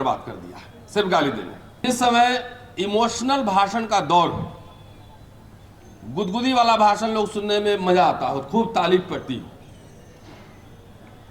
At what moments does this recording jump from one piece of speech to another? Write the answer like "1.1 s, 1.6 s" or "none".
1.8 s